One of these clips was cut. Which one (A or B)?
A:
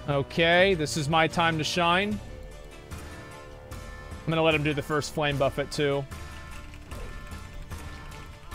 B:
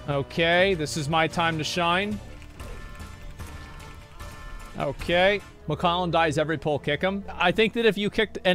B